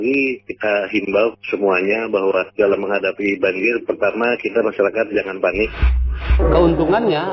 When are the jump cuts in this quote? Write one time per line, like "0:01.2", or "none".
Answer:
0:05.9